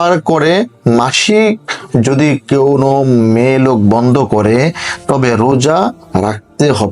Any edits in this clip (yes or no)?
no